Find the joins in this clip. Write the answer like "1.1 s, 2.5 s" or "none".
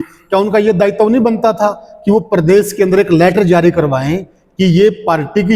none